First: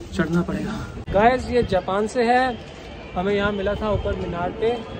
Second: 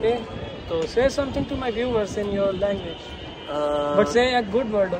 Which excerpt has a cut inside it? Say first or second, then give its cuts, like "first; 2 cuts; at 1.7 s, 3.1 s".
first; 1 cut; at 1.0 s